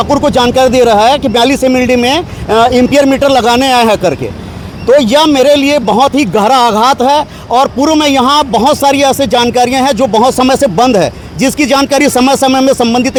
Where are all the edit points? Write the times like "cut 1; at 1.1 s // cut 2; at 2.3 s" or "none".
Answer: none